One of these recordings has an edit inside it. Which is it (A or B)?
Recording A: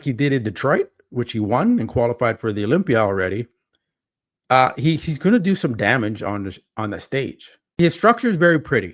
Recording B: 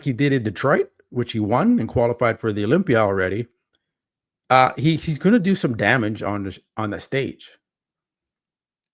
A